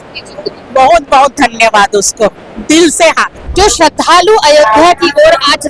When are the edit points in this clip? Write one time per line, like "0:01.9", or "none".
0:03.4